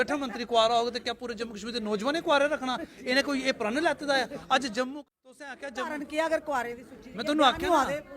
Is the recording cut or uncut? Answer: cut